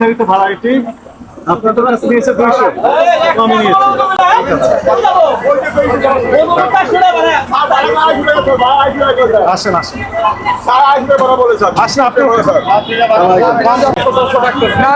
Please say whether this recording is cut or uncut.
uncut